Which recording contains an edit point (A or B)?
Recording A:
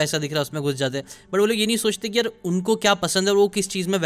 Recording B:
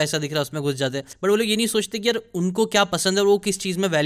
B